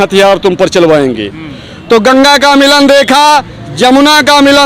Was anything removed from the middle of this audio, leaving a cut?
no; 0 cuts

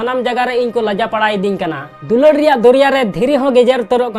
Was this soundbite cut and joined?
yes; 1 cut; at 1.8 s

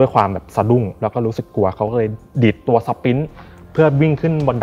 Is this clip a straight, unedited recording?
yes; 0 cuts

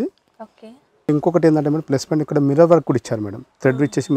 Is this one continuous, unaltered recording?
no; 1 cut; at 1.1 s

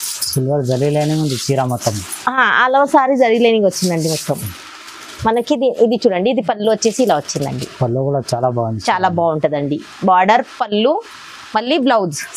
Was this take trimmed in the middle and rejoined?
no; 0 cuts

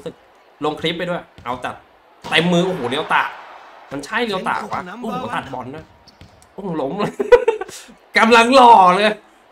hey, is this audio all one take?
yes; 0 cuts

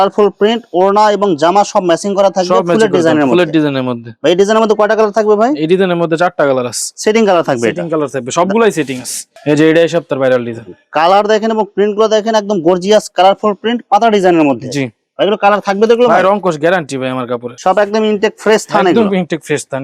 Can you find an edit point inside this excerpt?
no; 0 cuts

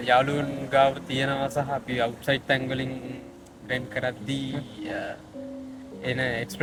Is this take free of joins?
yes; 0 cuts

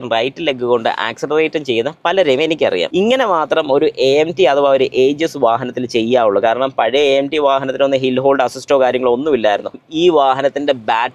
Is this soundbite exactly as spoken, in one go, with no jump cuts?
no; 2 cuts; at 2.9 s, 9.8 s

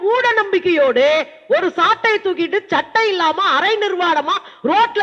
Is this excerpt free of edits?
yes; 0 cuts

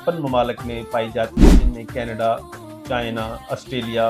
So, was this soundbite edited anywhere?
no; 0 cuts

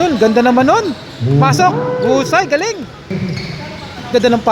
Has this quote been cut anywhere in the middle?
yes; 1 cut; at 3.1 s

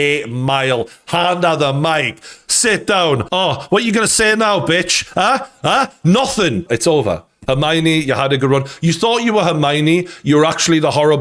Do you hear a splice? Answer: yes; 1 cut; at 6.6 s

